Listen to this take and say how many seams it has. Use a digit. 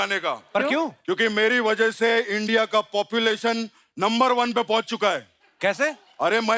0